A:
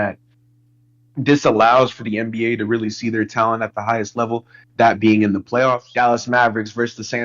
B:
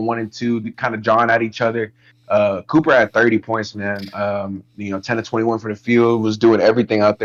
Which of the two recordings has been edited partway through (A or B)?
A